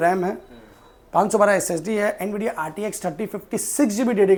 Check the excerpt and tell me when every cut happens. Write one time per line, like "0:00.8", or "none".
none